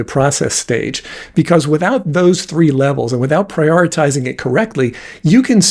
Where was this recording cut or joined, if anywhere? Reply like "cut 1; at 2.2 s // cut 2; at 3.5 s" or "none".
none